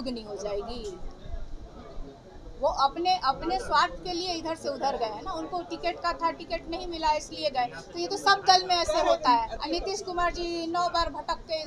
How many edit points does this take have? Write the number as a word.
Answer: one